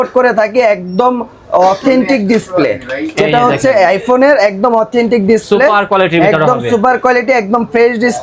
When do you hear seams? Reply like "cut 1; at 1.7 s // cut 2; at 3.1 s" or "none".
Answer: none